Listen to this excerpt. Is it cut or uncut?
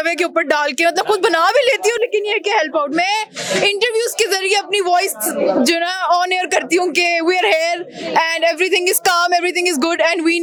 uncut